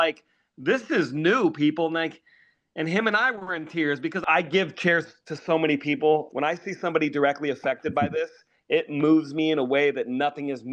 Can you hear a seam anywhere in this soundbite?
yes; 2 cuts; at 4.2 s, 6.3 s

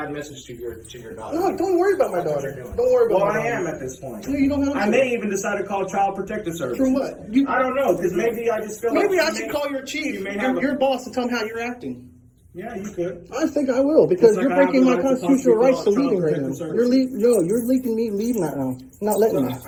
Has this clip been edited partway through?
no; 0 cuts

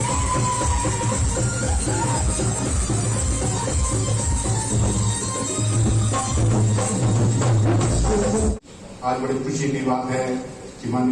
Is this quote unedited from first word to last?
no; 1 cut; at 8.5 s

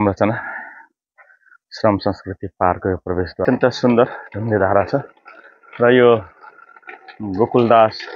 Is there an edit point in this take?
yes; 1 cut; at 3.5 s

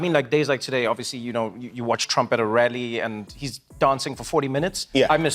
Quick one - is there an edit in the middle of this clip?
no; 0 cuts

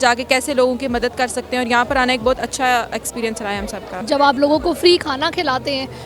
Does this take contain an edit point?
no; 0 cuts

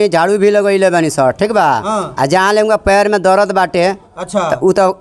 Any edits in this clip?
no; 0 cuts

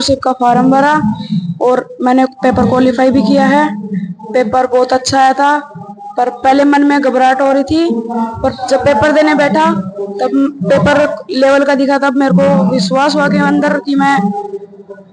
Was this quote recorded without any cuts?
yes; 0 cuts

